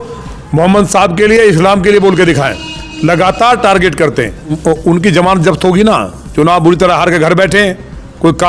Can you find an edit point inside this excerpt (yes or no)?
yes